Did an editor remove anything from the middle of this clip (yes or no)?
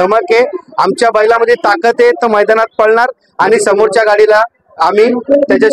no